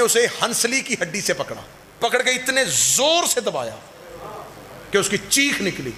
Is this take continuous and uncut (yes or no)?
no